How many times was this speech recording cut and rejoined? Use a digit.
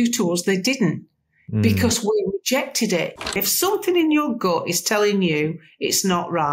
1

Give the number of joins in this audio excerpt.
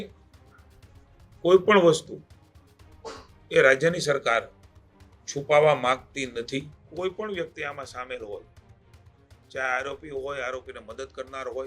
1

